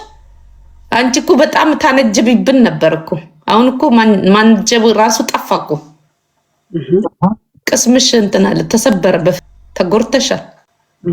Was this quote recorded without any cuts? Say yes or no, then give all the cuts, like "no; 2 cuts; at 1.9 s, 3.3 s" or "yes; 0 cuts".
no; 1 cut; at 9.4 s